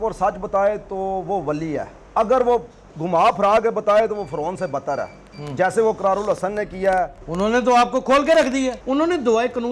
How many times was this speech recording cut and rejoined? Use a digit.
2